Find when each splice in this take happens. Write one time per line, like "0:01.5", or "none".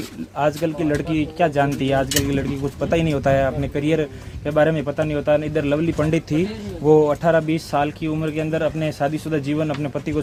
none